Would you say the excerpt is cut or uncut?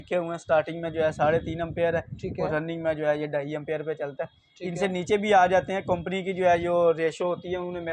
uncut